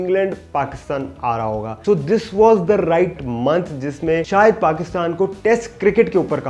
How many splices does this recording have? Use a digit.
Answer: 2